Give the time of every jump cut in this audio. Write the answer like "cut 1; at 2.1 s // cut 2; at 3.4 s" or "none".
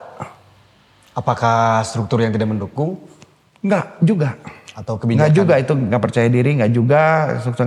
none